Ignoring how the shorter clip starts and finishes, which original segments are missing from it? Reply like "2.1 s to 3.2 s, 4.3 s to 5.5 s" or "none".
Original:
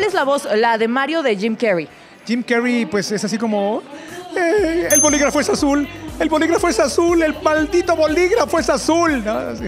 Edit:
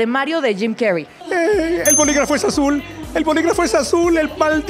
2.0 s to 4.2 s

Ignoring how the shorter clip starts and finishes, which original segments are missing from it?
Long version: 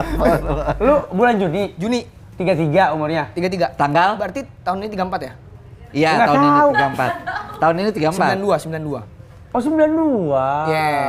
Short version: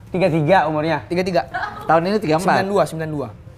3.7 s to 7.2 s

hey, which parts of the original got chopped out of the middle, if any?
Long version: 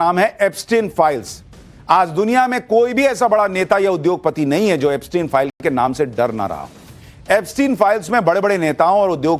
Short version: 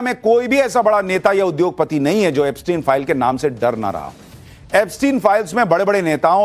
5.5 s to 5.6 s

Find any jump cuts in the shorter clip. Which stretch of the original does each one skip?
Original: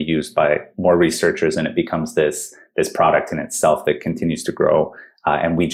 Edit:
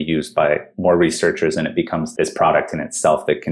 2.1 s to 2.6 s

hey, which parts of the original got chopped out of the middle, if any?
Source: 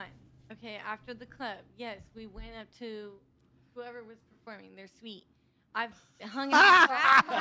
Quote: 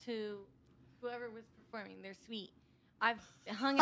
none

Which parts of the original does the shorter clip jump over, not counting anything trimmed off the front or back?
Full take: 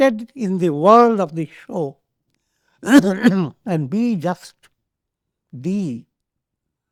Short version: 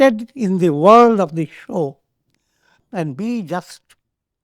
2.8 s to 3.5 s

